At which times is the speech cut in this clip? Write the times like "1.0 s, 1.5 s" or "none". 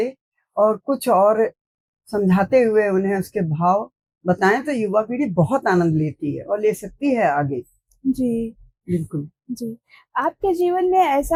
none